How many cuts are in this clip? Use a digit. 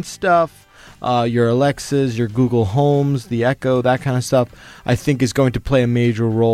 0